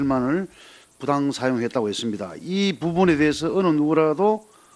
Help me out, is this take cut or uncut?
uncut